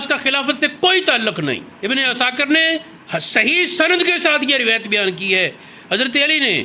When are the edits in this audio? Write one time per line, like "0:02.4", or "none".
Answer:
0:01.7